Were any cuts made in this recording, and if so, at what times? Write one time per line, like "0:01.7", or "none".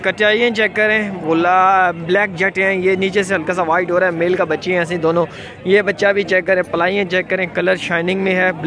none

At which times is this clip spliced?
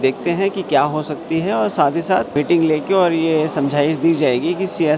0:02.3

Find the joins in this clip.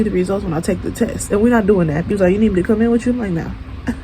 0:02.1

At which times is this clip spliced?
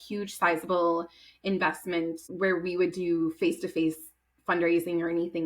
0:02.2

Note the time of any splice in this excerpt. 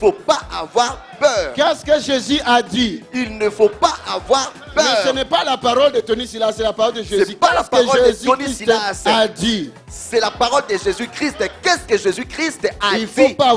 none

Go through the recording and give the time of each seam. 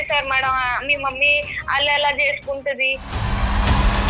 0:03.1

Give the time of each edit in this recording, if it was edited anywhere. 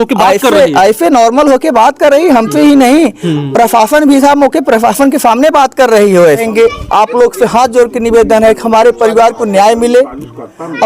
0:06.5

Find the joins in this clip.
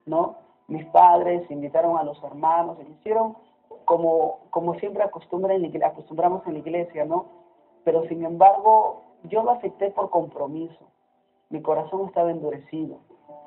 0:08.1

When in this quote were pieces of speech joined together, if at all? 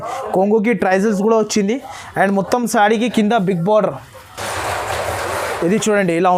none

